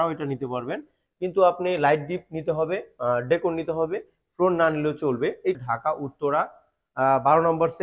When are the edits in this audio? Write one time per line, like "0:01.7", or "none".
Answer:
0:05.6